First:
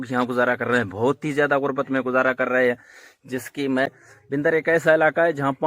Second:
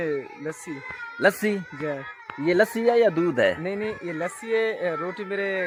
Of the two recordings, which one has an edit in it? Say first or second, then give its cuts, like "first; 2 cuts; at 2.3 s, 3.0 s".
first; 1 cut; at 3.9 s